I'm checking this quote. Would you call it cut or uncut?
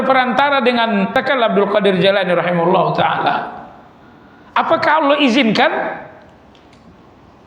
cut